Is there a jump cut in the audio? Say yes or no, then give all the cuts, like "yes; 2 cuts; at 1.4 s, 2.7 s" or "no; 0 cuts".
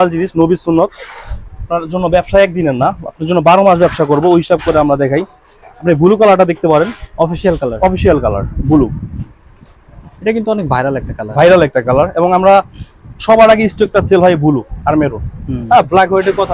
no; 0 cuts